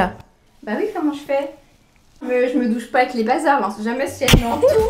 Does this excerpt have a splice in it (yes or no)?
no